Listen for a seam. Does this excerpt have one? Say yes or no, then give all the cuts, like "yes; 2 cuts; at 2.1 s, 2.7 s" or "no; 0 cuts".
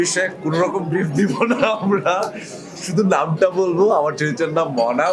no; 0 cuts